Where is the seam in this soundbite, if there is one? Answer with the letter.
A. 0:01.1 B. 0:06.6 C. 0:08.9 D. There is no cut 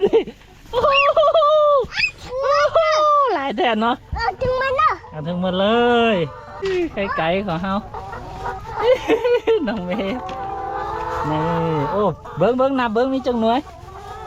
B